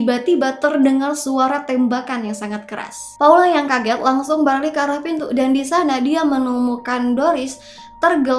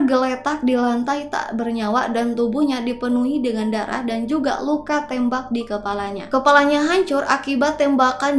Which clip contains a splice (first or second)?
second